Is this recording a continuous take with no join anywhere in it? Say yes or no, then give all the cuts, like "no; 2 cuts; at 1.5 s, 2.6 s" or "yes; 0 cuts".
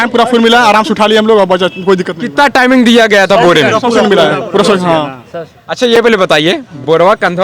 yes; 0 cuts